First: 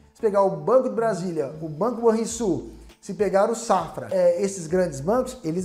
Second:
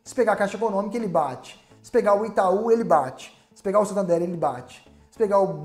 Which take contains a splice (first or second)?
first